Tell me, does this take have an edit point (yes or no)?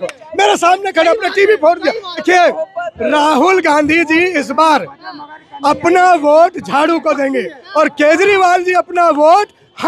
yes